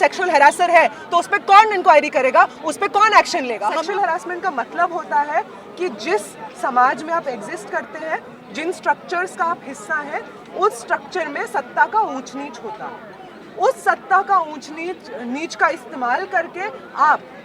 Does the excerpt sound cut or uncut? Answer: cut